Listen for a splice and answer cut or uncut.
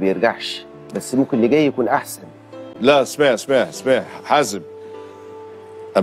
uncut